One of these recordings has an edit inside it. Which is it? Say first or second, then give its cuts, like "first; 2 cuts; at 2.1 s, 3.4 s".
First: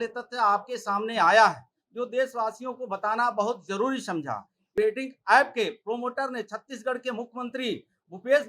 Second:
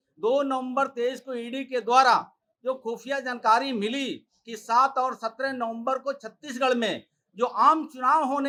first; 1 cut; at 4.7 s